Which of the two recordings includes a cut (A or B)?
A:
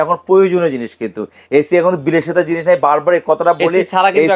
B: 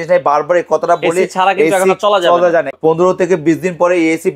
B